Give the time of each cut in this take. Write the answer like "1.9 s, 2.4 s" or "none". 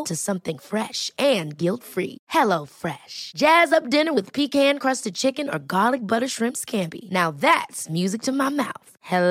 none